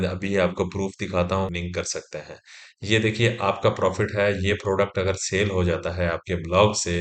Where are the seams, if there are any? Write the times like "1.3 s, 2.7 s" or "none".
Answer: 1.5 s